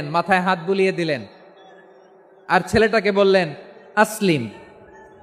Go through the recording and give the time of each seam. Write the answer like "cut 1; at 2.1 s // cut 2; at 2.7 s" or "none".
none